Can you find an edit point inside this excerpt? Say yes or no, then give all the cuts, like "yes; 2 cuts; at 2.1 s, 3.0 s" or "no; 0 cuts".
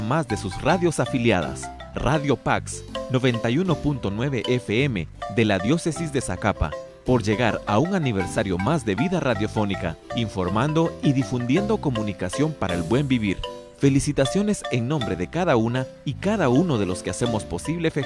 no; 0 cuts